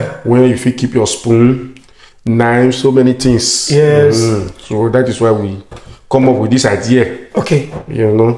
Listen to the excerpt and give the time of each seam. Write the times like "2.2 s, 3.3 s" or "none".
none